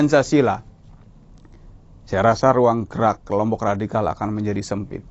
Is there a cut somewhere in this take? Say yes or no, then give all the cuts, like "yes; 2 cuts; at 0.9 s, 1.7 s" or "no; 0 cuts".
no; 0 cuts